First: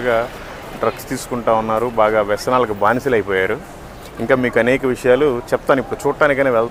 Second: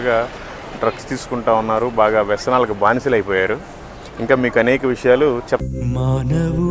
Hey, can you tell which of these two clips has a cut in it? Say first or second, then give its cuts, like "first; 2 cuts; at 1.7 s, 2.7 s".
second; 1 cut; at 5.6 s